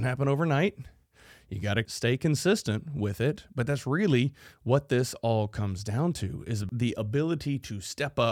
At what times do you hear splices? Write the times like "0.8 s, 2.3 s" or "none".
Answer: 1.9 s, 6.7 s